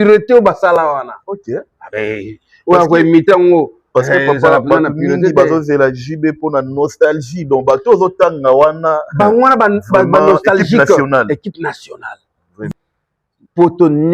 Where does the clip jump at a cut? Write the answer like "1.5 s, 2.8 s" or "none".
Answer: 12.7 s